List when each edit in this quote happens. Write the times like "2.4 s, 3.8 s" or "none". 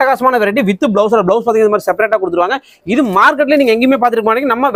none

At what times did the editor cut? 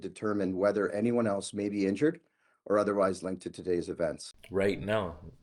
4.3 s

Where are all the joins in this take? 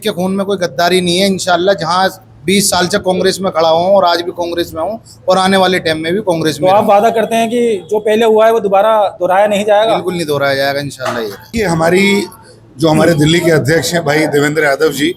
none

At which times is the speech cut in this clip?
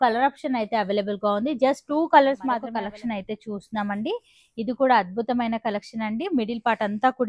2.7 s

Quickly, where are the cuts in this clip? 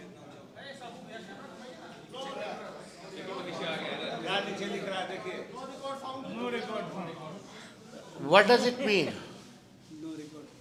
none

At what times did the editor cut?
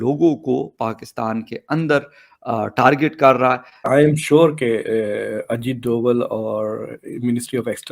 3.7 s

